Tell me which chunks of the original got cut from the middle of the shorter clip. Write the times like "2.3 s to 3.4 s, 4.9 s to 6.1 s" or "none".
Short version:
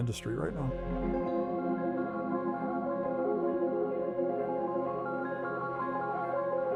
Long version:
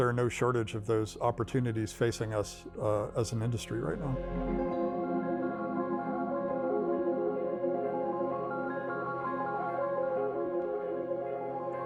none